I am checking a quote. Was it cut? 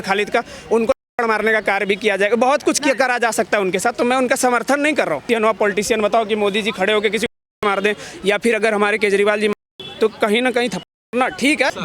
yes; 1 cut; at 5.2 s

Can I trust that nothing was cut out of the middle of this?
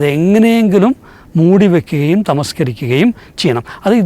yes; 0 cuts

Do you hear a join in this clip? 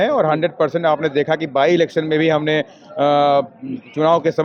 no; 0 cuts

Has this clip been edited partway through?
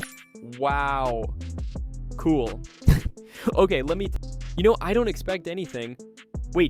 yes; 1 cut; at 4.1 s

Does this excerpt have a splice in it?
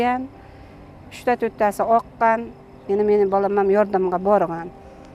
no; 0 cuts

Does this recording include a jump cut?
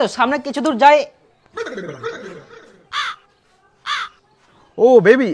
no; 0 cuts

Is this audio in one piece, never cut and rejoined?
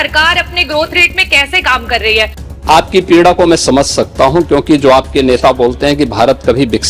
no; 1 cut; at 2.4 s

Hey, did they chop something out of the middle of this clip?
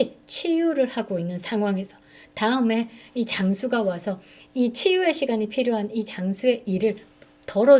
no; 0 cuts

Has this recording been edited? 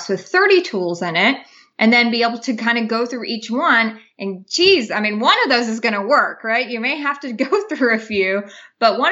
no; 0 cuts

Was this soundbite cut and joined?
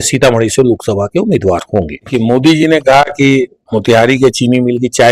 yes; 1 cut; at 2.0 s

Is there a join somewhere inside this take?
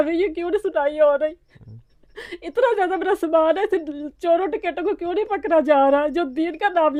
no; 0 cuts

